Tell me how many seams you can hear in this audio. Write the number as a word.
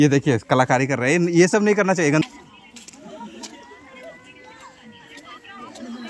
one